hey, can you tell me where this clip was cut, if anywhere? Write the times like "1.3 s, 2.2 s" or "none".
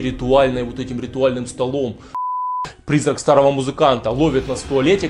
2.5 s